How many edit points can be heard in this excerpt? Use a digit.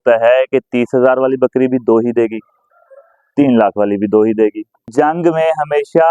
1